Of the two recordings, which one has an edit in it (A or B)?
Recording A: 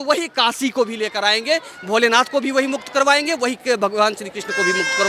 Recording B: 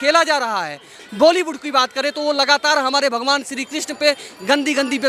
B